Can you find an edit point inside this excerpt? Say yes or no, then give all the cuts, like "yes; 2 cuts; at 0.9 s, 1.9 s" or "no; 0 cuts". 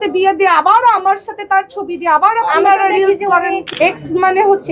yes; 1 cut; at 3.7 s